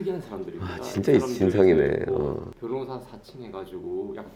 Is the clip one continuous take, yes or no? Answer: no